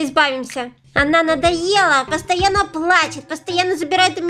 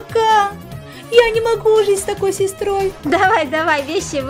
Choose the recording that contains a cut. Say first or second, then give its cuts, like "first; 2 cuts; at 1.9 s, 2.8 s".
second; 1 cut; at 3.0 s